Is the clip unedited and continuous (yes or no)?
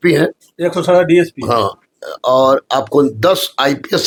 yes